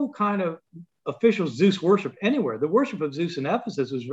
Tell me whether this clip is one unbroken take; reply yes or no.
yes